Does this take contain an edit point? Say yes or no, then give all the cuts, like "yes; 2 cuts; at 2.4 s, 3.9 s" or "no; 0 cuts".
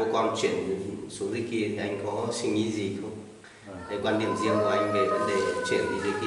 no; 0 cuts